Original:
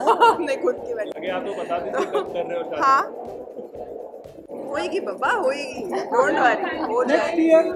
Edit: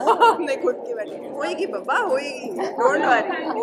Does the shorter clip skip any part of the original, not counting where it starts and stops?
yes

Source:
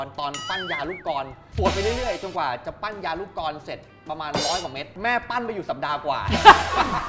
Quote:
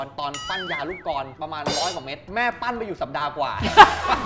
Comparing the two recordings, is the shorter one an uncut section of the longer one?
no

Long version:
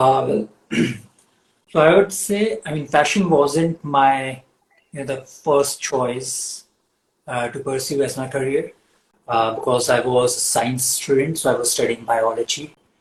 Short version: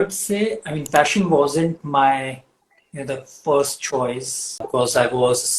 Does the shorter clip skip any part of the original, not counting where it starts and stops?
yes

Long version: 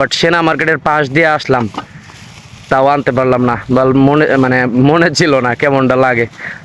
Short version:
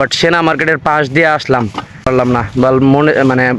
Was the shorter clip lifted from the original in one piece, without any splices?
no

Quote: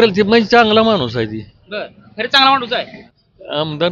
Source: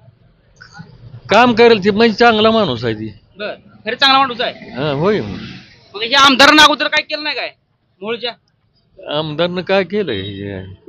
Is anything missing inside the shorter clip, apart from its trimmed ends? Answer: yes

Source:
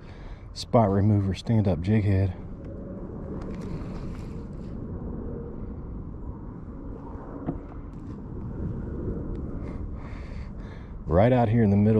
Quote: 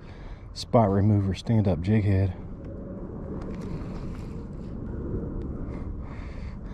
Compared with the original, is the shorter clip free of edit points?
no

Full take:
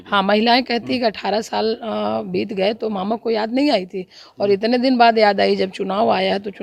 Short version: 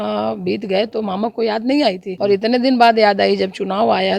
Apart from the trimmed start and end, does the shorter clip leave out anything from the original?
yes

